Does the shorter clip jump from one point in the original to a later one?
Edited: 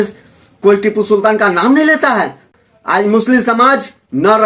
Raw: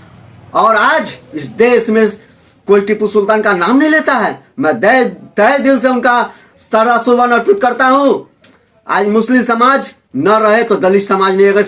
yes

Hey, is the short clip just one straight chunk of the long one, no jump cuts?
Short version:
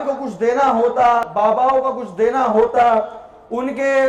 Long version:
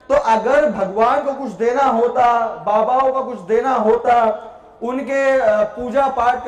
no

